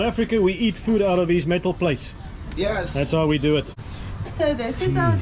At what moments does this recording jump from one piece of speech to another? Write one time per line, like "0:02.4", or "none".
0:03.8